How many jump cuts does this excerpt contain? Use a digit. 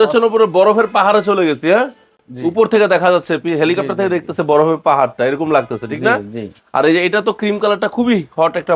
0